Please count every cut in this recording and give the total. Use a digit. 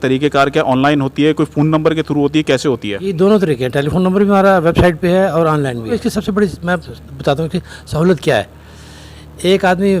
1